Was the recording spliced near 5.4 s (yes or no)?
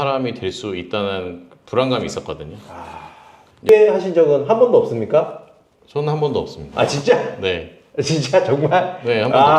no